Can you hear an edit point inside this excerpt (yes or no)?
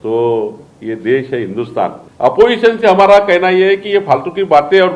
yes